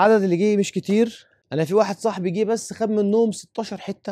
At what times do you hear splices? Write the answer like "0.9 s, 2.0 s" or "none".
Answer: none